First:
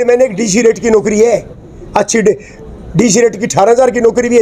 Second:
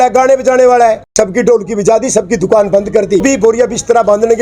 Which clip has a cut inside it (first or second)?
second